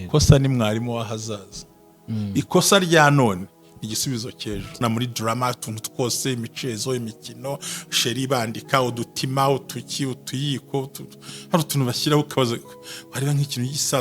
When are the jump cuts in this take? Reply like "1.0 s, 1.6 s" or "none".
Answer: 4.8 s